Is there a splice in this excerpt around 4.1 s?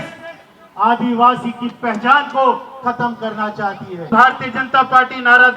yes; 1 cut; at 4.1 s

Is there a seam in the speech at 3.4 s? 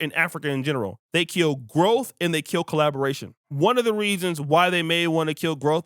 yes; 2 cuts; at 1.0 s, 3.4 s

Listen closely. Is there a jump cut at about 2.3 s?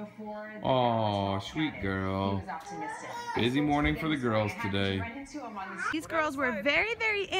no; 1 cut; at 3.6 s

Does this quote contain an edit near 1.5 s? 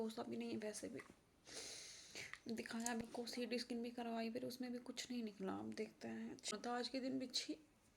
no; 2 cuts; at 3.0 s, 6.9 s

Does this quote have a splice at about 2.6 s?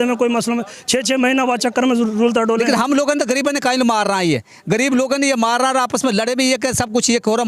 yes; 1 cut; at 2.6 s

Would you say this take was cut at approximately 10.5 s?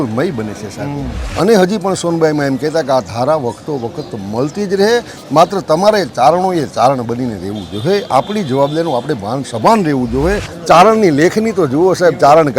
yes; 2 cuts; at 1.2 s, 10.5 s

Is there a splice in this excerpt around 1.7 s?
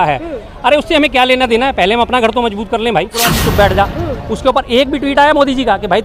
no; 1 cut; at 3.4 s

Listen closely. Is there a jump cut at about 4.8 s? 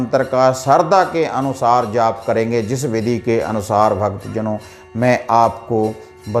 no; 0 cuts

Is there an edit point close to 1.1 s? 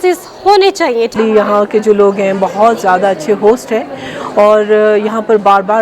yes; 1 cut; at 1.1 s

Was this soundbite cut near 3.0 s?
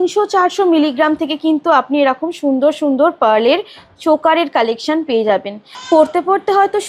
no; 1 cut; at 5.7 s

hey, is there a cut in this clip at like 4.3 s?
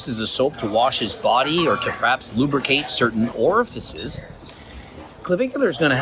yes; 1 cut; at 4.3 s

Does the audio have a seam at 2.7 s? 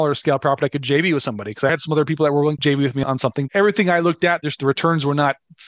yes; 1 cut; at 2.7 s

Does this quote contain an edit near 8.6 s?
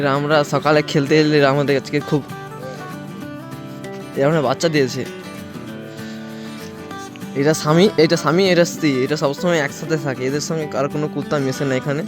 no; 2 cuts; at 5.1 s, 7.3 s

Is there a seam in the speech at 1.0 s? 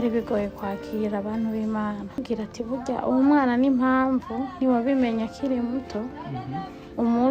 no; 1 cut; at 2.2 s

